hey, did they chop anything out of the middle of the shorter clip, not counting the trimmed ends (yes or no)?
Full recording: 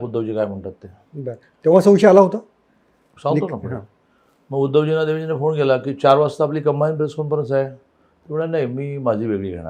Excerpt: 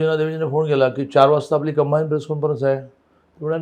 no